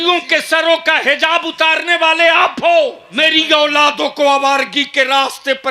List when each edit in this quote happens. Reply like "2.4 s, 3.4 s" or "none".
3.0 s